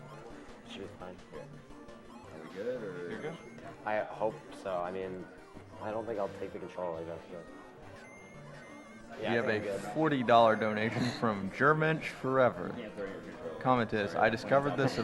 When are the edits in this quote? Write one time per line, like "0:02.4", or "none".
0:02.5